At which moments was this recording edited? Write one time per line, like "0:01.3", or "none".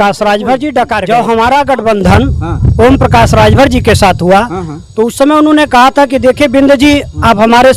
0:01.0